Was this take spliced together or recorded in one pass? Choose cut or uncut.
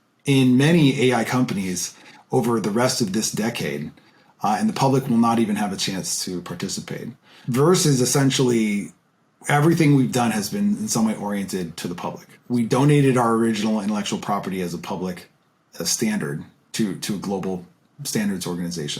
cut